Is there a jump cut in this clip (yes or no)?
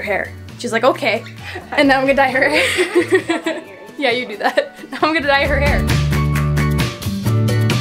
no